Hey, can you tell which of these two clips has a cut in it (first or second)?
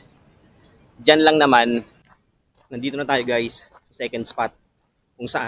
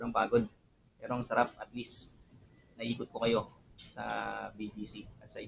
first